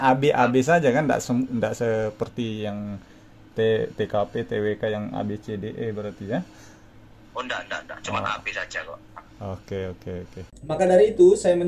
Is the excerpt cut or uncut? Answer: cut